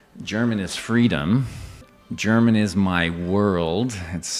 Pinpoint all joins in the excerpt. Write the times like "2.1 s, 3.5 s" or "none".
none